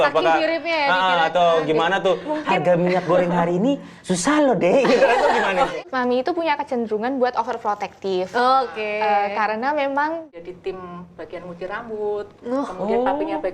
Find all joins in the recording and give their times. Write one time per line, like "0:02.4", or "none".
0:05.8
0:10.3